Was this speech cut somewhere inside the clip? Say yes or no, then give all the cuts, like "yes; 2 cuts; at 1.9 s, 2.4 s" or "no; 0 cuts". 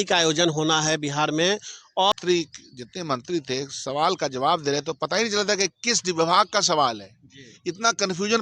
yes; 1 cut; at 2.1 s